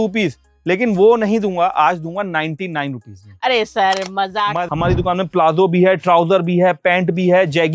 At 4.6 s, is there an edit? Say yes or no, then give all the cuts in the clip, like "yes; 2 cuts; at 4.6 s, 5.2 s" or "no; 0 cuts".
yes; 1 cut; at 4.6 s